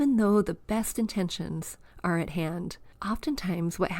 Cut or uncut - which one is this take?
cut